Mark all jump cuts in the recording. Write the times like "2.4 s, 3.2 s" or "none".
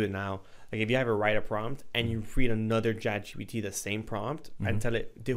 none